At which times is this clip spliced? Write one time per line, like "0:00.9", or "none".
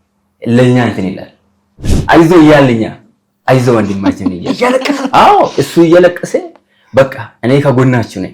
0:01.9